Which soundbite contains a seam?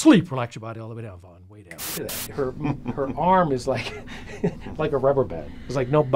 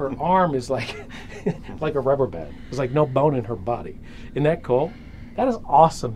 first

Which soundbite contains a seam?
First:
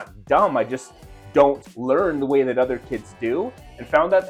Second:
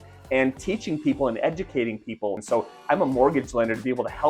second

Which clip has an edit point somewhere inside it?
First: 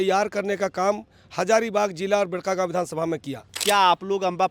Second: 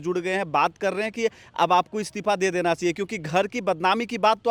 first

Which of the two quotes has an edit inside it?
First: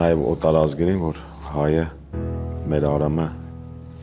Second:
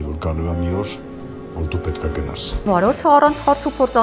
second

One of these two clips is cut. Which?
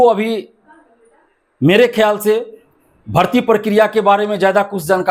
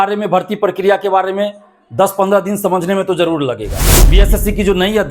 second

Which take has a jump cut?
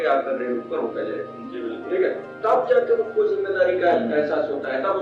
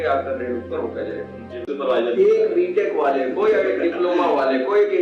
second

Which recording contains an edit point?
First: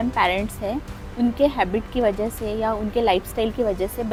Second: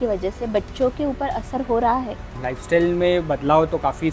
second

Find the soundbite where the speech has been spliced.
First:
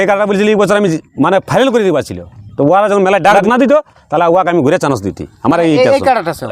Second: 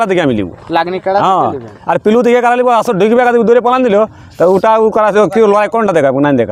first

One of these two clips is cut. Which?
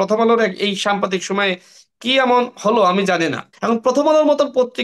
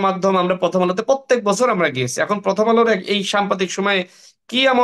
first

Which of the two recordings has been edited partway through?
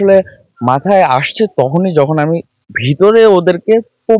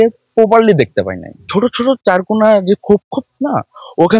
second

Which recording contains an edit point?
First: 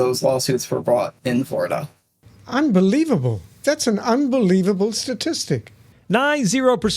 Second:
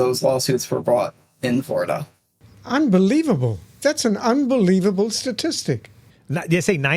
first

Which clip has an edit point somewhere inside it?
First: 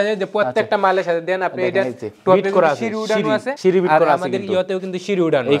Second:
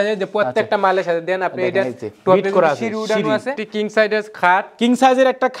second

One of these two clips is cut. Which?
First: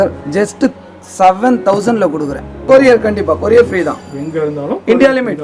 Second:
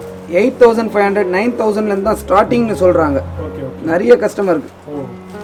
first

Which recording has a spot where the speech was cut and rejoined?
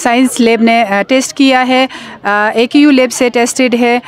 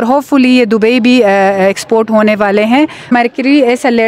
second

